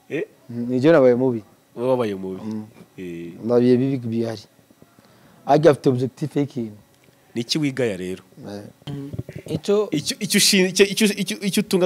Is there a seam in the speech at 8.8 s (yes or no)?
yes